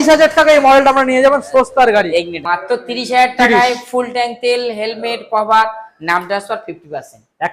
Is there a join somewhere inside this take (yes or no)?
yes